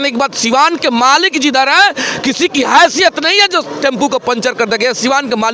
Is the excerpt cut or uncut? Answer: uncut